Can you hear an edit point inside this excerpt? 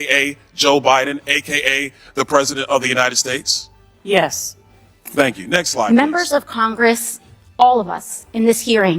yes; 1 cut; at 5.9 s

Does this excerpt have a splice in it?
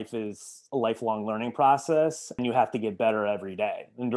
yes; 1 cut; at 2.4 s

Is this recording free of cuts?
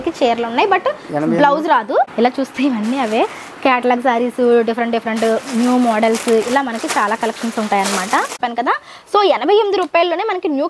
no; 2 cuts; at 2.1 s, 8.3 s

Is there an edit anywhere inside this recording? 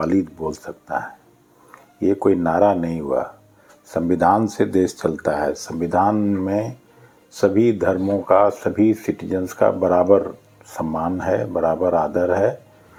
no; 0 cuts

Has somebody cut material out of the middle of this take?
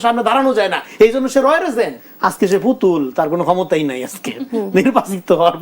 yes; 1 cut; at 2.0 s

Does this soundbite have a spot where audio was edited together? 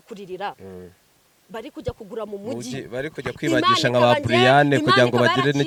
no; 0 cuts

